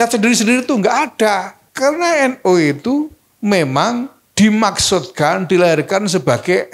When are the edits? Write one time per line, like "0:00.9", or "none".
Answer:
0:01.6
0:03.2
0:04.2